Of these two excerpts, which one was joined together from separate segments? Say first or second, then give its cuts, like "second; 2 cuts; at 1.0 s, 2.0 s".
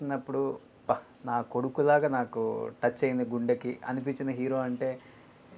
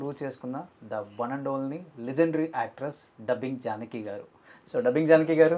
first; 1 cut; at 1.1 s